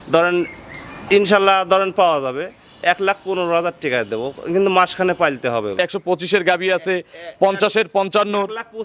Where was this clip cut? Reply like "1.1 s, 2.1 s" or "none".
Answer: 5.7 s